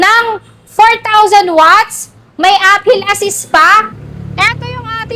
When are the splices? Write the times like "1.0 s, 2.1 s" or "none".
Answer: 4.0 s